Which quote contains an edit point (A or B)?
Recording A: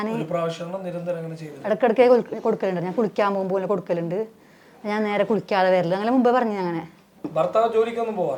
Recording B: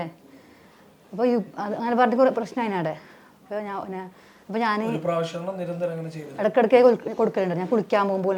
A